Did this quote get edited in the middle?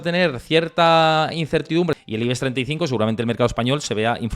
yes; 1 cut; at 2.0 s

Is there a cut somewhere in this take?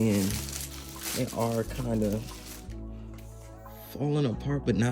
no; 0 cuts

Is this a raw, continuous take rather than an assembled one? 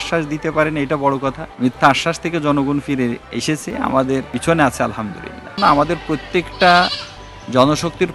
no; 4 cuts; at 1.5 s, 3.3 s, 4.3 s, 5.6 s

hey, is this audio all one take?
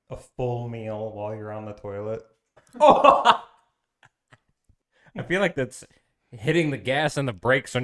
no; 1 cut; at 4.6 s

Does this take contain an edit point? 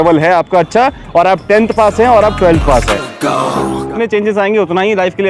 yes; 1 cut; at 4.0 s

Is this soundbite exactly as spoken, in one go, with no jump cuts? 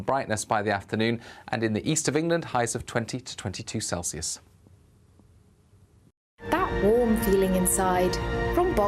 no; 1 cut; at 6.3 s

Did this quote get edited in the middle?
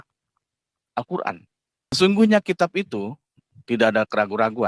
yes; 1 cut; at 2.0 s

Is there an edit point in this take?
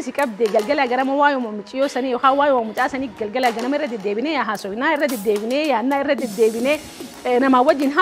no; 0 cuts

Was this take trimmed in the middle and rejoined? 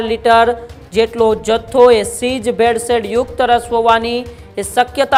no; 0 cuts

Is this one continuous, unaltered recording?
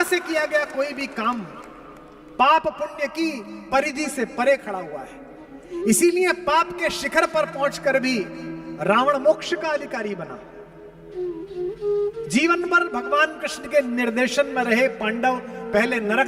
yes; 0 cuts

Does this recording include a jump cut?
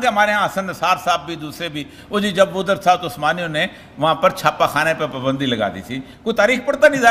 no; 0 cuts

